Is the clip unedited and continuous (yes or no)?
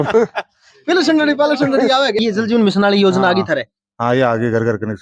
no